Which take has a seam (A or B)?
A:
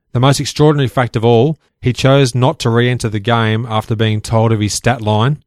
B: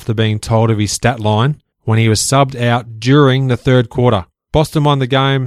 B